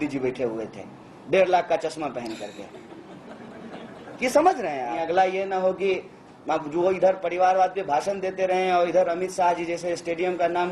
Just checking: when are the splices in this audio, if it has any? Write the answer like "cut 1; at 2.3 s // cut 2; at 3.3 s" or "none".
cut 1; at 5.0 s